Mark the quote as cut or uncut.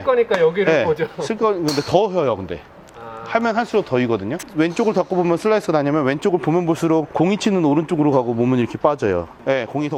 uncut